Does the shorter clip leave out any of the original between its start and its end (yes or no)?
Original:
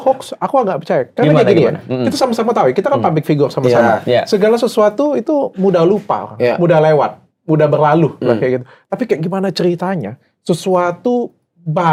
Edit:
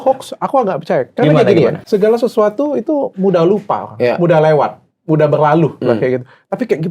yes